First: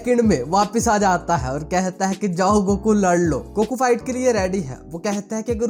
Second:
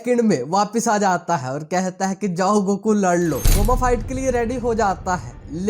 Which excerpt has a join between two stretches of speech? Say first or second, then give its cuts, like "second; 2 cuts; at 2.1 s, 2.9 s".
second; 1 cut; at 3.4 s